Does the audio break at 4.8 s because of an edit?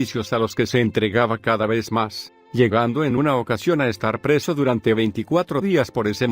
no; 1 cut; at 3.4 s

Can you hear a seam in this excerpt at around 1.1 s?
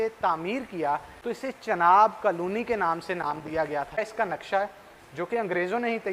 yes; 2 cuts; at 1.1 s, 4.0 s

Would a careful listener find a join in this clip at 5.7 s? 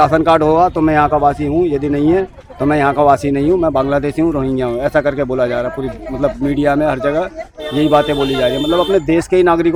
no; 0 cuts

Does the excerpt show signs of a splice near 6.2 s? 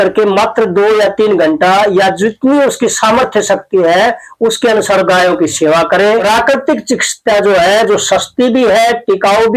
yes; 1 cut; at 6.2 s

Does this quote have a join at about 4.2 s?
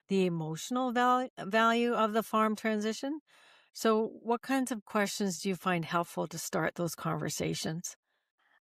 no; 0 cuts

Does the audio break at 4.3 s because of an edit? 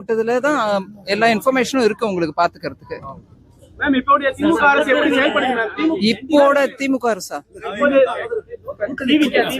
no; 1 cut; at 1.5 s

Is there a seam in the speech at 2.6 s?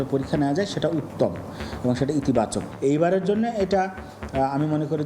yes; 1 cut; at 2.6 s

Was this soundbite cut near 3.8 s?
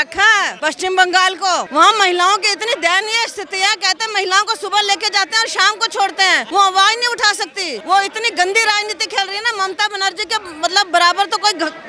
no; 3 cuts; at 1.7 s, 6.4 s, 7.7 s

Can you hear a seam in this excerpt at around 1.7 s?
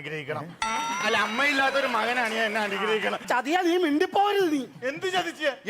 no; 1 cut; at 3.2 s

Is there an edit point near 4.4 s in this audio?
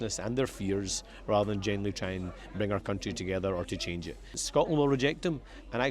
yes; 1 cut; at 4.4 s

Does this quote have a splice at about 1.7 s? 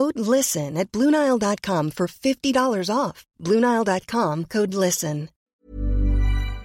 no; 1 cut; at 5.6 s

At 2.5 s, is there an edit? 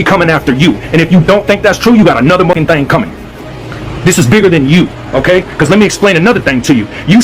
yes; 1 cut; at 2.5 s

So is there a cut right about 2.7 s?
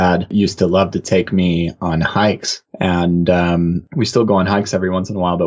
no; 0 cuts

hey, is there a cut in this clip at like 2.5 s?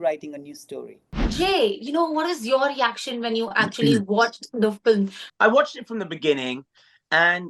no; 2 cuts; at 1.2 s, 5.2 s

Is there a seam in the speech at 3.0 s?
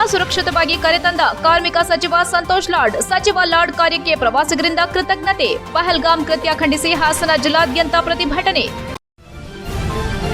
no; 1 cut; at 8.9 s

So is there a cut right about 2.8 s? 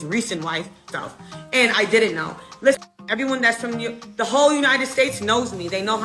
yes; 2 cuts; at 0.9 s, 2.8 s

